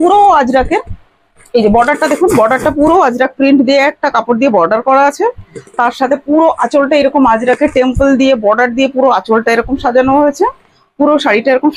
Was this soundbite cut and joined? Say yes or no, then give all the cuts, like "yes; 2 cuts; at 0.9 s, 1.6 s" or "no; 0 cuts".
no; 0 cuts